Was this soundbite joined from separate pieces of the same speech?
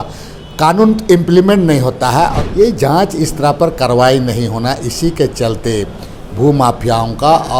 yes; 1 cut; at 2.4 s

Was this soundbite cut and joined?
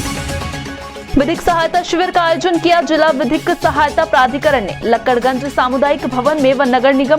yes; 1 cut; at 1.0 s

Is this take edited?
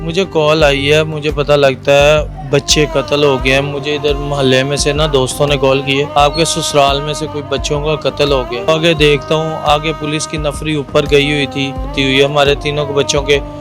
yes; 3 cuts; at 6.1 s, 8.7 s, 11.9 s

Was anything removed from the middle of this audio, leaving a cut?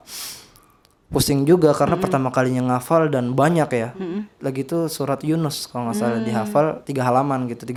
no; 0 cuts

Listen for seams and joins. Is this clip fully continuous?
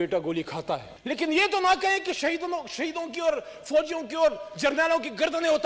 no; 1 cut; at 0.9 s

